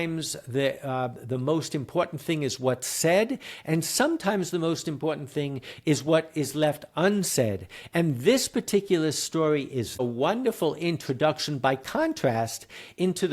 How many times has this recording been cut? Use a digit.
1